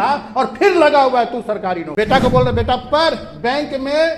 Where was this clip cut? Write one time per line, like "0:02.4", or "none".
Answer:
0:01.9